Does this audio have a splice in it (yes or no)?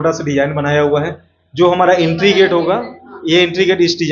no